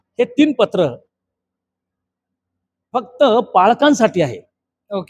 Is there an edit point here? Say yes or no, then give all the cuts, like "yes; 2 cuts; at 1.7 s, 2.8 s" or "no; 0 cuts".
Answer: no; 0 cuts